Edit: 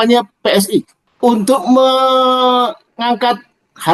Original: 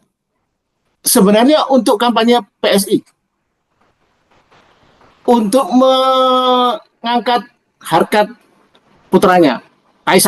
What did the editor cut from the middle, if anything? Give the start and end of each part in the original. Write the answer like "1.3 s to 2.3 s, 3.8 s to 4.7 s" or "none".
3.2 s to 5.1 s